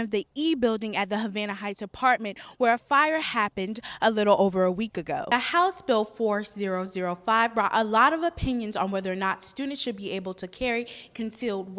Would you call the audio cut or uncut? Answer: cut